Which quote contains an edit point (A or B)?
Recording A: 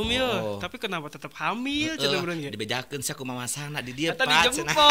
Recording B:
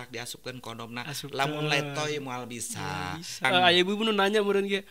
B